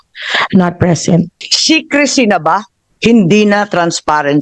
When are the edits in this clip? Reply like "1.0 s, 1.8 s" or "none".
1.5 s